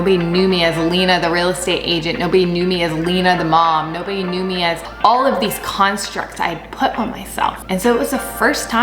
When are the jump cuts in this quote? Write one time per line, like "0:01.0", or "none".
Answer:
0:04.9
0:07.6

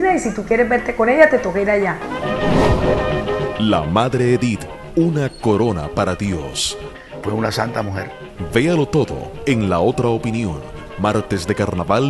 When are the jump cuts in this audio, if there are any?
0:01.9
0:05.1

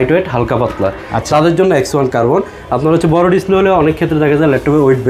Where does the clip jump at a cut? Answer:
none

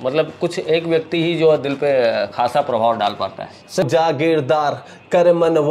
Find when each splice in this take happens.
0:03.8

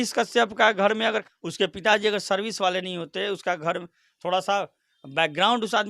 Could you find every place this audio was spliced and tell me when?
0:01.2

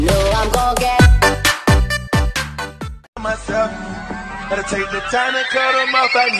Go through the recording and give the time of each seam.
0:03.0

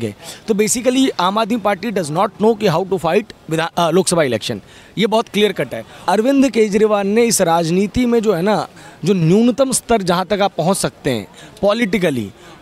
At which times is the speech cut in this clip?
0:05.9

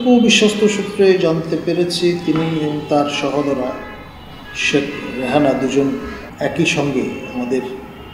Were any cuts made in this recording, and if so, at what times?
0:06.2

